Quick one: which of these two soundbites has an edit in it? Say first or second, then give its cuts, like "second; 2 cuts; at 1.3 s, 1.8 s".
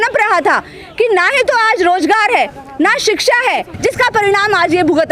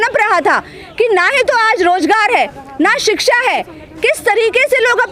first; 1 cut; at 3.7 s